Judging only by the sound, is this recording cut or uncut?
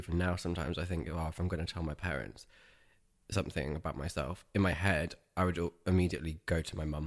uncut